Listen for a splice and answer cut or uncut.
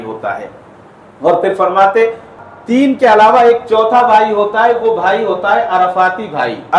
cut